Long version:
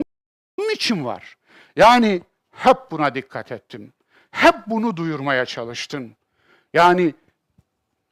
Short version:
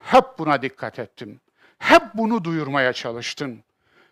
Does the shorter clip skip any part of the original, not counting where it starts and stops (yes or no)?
no